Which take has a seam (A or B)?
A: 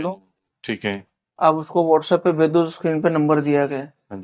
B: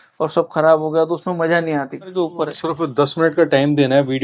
B